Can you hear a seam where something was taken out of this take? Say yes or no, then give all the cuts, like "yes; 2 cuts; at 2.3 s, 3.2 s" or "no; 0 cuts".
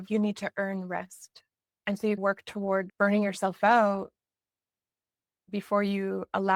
no; 0 cuts